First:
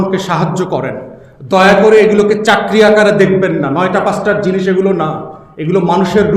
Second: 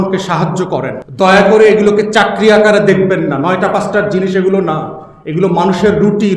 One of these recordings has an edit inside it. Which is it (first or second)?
second